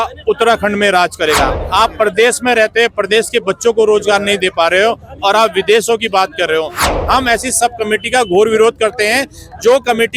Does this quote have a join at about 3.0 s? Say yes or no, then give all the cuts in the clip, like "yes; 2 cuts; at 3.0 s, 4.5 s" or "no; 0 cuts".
no; 2 cuts; at 1.6 s, 6.8 s